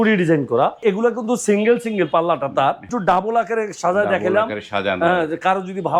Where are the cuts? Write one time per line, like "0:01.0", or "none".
0:00.8
0:02.9